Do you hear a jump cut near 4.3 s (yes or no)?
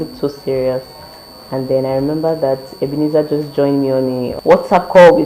yes